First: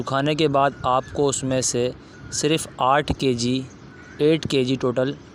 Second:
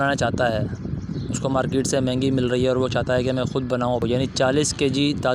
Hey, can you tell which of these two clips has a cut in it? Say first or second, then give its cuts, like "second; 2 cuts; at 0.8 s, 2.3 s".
second; 1 cut; at 4.0 s